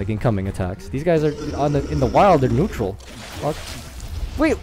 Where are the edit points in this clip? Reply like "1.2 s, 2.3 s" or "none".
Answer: none